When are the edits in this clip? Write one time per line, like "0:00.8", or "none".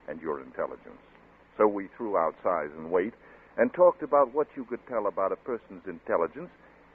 0:03.2